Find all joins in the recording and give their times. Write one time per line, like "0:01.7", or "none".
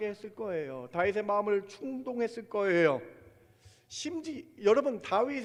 none